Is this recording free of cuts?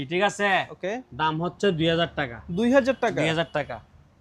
yes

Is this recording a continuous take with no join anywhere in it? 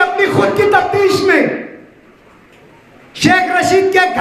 yes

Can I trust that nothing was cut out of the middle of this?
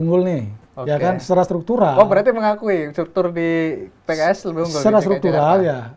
yes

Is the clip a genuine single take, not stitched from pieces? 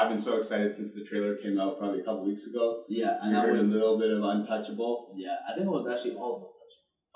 yes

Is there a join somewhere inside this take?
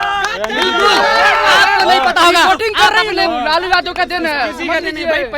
no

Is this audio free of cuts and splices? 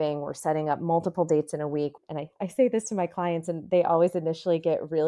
no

